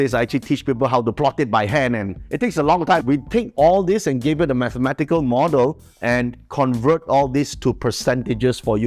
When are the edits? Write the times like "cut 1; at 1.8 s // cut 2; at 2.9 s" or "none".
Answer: cut 1; at 3.0 s